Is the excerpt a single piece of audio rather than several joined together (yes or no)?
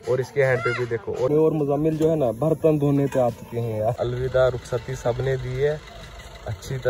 no